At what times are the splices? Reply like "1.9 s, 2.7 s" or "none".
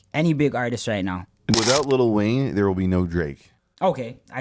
1.5 s